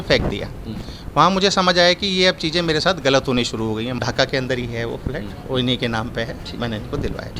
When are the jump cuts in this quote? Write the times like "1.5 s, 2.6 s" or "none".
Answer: 4.0 s